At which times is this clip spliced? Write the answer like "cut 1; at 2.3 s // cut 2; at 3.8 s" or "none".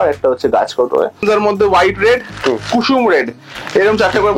cut 1; at 1.2 s